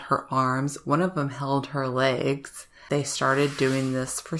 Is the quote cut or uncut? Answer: cut